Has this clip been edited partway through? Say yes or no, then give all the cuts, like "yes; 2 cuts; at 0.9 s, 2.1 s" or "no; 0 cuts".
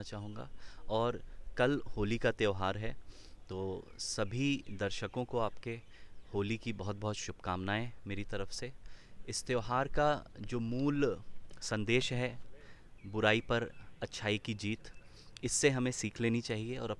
no; 0 cuts